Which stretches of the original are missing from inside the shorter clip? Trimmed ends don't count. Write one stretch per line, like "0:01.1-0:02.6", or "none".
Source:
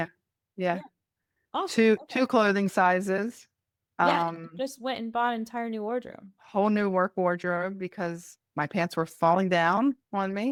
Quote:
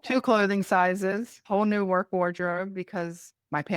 0:03.4-0:06.4